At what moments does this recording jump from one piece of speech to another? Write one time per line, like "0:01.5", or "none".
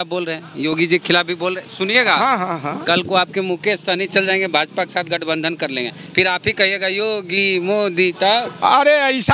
none